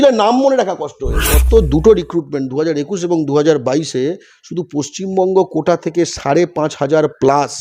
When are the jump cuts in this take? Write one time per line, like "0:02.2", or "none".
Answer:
0:01.3